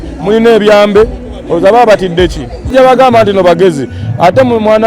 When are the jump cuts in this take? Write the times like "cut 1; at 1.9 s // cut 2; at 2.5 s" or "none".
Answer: cut 1; at 2.7 s